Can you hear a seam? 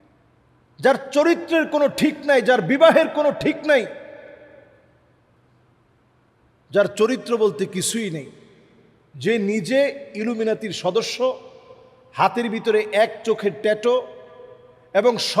no; 0 cuts

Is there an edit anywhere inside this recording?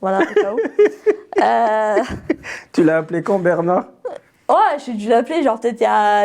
no; 0 cuts

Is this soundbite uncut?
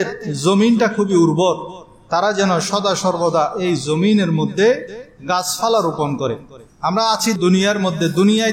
yes; 0 cuts

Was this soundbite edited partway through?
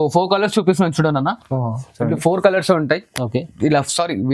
no; 0 cuts

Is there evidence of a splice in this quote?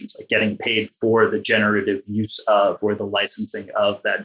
no; 0 cuts

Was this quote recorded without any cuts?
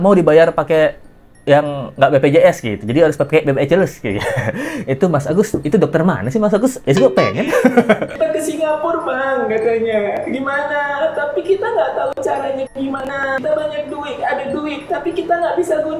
no; 2 cuts; at 8.1 s, 13.4 s

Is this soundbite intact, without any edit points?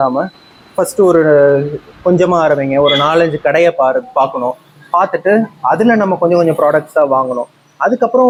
yes; 0 cuts

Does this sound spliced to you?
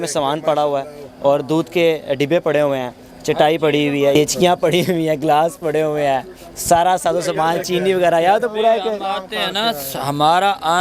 yes; 1 cut; at 4.1 s

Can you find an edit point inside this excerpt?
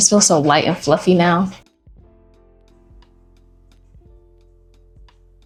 no; 0 cuts

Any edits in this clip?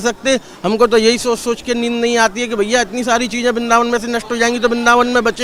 no; 0 cuts

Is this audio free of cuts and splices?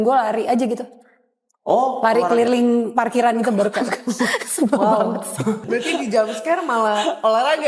no; 1 cut; at 5.6 s

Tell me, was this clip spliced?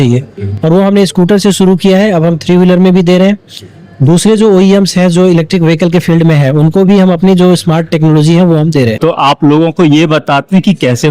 yes; 1 cut; at 9.0 s

